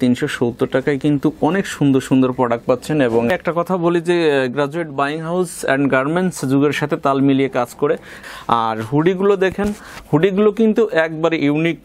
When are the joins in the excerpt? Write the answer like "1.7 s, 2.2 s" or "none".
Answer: 3.3 s, 8.1 s